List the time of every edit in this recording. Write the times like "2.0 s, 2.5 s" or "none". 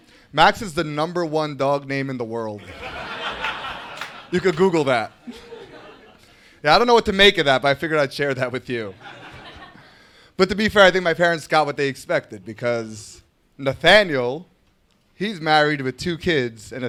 none